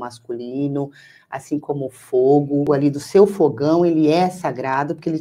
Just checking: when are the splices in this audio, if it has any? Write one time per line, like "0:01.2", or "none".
0:02.7